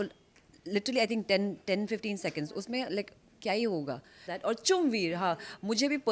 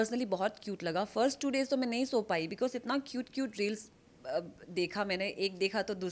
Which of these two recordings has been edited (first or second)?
first